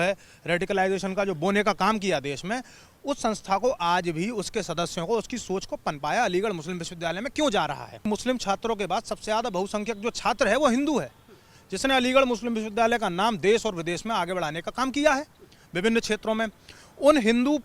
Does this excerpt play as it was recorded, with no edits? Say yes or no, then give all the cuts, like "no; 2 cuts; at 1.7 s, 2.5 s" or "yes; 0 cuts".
no; 1 cut; at 8.0 s